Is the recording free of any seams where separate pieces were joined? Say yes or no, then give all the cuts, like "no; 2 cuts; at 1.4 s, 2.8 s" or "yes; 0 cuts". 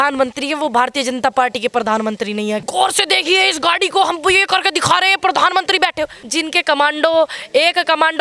no; 2 cuts; at 2.6 s, 6.2 s